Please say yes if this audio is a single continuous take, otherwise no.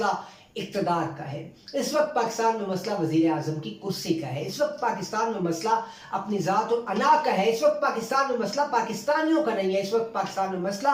yes